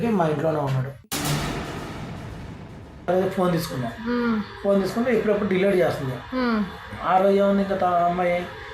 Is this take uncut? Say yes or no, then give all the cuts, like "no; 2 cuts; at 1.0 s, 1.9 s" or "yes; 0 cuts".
no; 1 cut; at 3.1 s